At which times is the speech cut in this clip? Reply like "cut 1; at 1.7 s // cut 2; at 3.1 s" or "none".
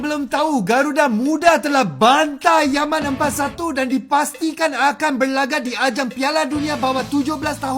none